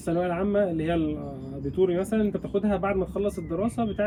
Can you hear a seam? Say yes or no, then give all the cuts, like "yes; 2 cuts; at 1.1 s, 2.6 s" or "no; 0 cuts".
no; 0 cuts